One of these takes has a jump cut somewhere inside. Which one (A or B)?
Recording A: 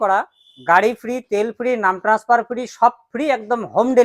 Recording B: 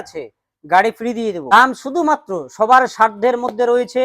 B